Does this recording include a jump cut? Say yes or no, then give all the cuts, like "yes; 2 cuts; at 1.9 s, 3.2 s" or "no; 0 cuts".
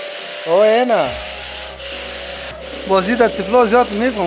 yes; 1 cut; at 2.6 s